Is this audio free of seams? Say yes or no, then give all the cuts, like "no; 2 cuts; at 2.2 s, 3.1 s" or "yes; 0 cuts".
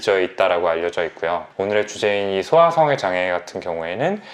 yes; 0 cuts